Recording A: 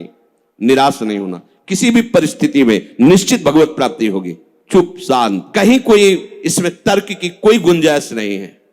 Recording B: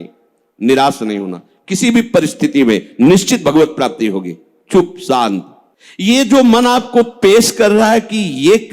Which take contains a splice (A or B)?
B